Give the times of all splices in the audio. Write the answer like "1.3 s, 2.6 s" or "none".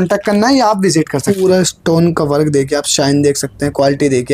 1.3 s